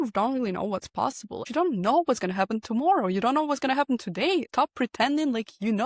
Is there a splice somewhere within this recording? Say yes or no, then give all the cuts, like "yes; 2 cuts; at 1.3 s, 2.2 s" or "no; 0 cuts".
yes; 1 cut; at 1.4 s